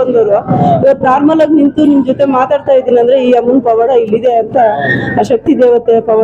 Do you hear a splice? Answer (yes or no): no